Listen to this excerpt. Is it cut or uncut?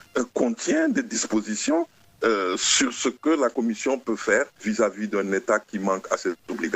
cut